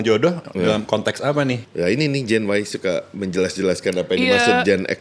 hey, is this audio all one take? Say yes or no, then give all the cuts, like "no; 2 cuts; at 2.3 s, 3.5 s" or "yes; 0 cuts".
no; 1 cut; at 1.7 s